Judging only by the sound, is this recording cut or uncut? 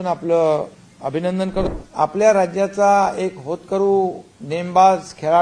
cut